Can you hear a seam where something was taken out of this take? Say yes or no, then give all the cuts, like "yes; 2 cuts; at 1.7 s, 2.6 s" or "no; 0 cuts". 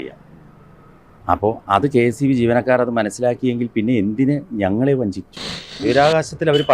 yes; 1 cut; at 5.8 s